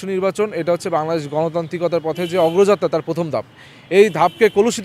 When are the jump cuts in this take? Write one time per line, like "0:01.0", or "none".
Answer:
none